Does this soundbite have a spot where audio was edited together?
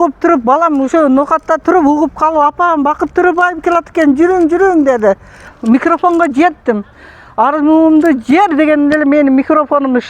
yes; 1 cut; at 5.5 s

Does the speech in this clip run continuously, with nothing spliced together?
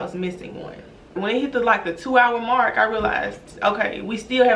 no; 1 cut; at 1.1 s

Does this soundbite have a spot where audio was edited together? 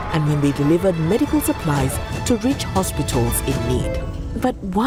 no; 0 cuts

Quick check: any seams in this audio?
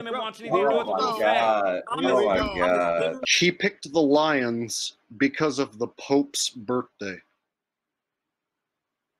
yes; 2 cuts; at 1.9 s, 3.2 s

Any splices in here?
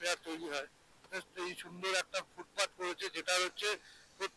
yes; 1 cut; at 1.1 s

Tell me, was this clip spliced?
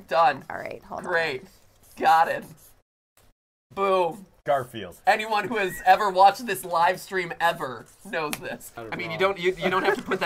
yes; 1 cut; at 8.8 s

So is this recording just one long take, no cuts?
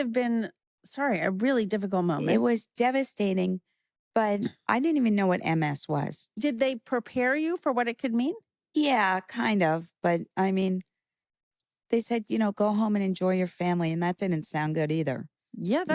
yes; 0 cuts

